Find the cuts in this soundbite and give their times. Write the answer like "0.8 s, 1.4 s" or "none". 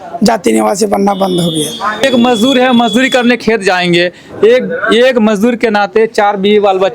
2.0 s